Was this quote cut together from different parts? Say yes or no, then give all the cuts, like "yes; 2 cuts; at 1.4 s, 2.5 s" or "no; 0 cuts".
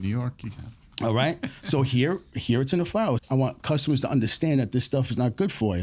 yes; 1 cut; at 3.2 s